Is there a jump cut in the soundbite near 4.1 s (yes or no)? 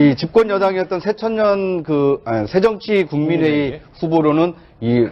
no